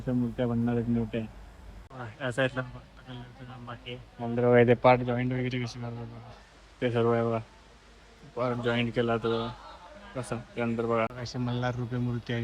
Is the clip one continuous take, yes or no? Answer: no